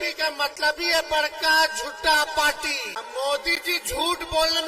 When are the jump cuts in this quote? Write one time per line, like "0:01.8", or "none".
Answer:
0:02.9